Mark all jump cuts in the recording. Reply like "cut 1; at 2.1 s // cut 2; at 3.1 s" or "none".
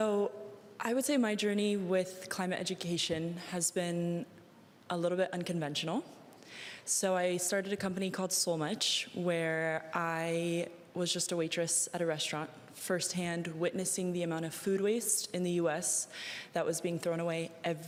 none